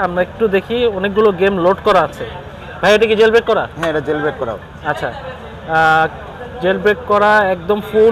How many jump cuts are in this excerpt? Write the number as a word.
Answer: zero